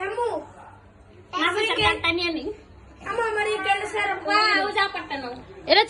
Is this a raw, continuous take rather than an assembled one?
yes; 0 cuts

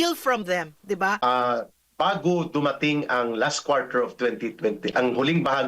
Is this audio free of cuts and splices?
no; 1 cut; at 1.2 s

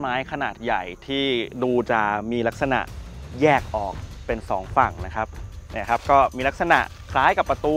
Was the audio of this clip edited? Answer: no; 0 cuts

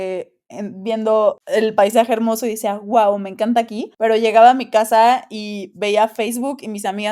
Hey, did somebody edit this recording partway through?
yes; 2 cuts; at 1.4 s, 3.8 s

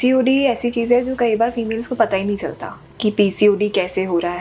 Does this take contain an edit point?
no; 0 cuts

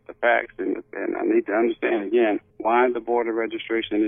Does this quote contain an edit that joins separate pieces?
yes; 1 cut; at 2.5 s

